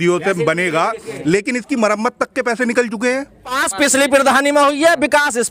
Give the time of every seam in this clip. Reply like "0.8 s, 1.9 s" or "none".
3.6 s